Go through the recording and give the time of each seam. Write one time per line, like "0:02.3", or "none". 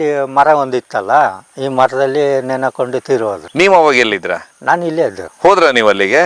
none